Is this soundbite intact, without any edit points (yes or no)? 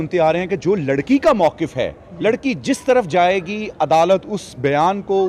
yes